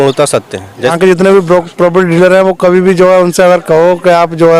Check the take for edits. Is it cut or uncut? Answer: cut